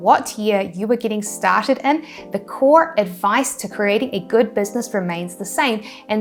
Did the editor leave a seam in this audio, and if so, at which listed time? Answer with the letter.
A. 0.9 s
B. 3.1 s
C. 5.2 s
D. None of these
D